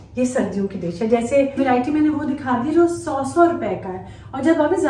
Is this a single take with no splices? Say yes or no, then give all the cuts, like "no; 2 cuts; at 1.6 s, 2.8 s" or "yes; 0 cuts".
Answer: no; 1 cut; at 1.6 s